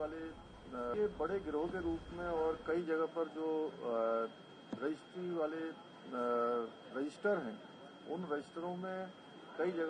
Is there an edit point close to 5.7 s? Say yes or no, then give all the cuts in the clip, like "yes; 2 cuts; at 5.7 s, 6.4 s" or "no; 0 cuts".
no; 1 cut; at 0.9 s